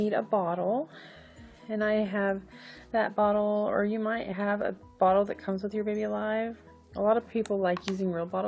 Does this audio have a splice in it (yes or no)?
no